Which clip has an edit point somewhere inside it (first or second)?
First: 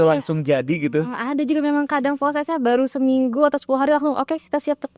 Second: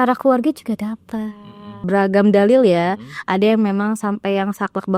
second